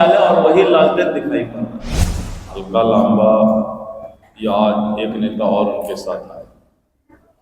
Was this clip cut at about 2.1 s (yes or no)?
yes